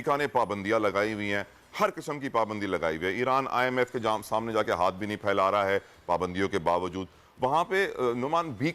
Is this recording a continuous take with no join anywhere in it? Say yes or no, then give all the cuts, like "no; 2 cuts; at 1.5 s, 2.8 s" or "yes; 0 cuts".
yes; 0 cuts